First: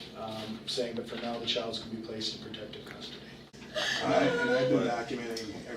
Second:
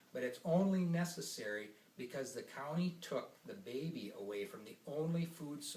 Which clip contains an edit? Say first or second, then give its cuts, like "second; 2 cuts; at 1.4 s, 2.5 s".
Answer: first; 1 cut; at 3.5 s